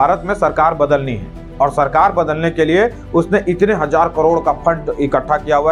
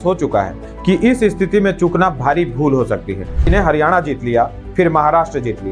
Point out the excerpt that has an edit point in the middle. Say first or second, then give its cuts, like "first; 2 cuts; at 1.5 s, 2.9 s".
second; 1 cut; at 3.5 s